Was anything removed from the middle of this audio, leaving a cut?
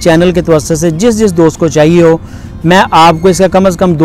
no; 0 cuts

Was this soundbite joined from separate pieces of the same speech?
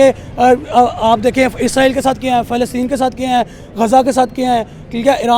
no; 0 cuts

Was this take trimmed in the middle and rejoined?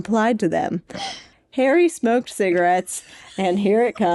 yes; 1 cut; at 1.2 s

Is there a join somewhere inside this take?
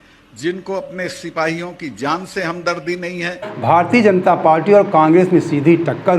yes; 1 cut; at 3.5 s

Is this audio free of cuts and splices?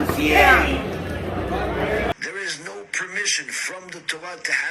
no; 1 cut; at 2.1 s

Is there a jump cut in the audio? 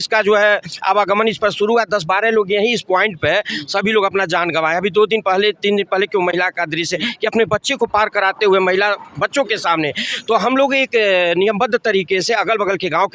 no; 0 cuts

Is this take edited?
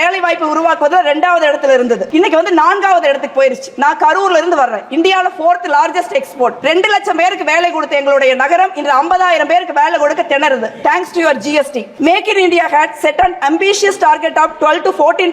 yes; 3 cuts; at 2.1 s, 6.6 s, 11.8 s

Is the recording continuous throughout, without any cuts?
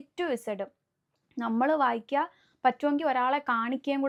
yes; 0 cuts

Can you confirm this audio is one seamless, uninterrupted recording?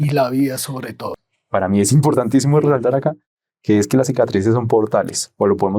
no; 1 cut; at 1.2 s

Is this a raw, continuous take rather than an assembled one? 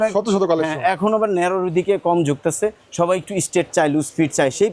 yes; 0 cuts

